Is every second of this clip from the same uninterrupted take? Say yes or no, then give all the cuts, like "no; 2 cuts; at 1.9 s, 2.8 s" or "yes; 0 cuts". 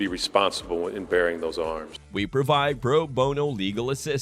yes; 0 cuts